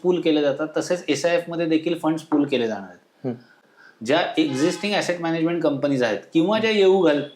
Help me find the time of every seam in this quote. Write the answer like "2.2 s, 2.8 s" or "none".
3.6 s